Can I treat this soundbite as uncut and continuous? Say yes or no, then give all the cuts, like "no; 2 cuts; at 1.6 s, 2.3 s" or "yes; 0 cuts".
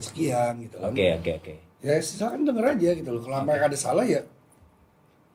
yes; 0 cuts